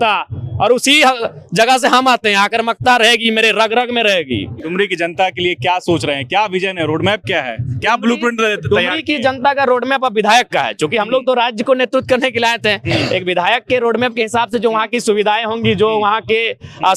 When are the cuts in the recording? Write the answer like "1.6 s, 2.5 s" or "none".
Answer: none